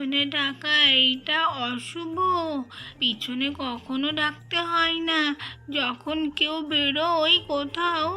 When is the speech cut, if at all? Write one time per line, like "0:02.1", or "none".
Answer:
0:02.8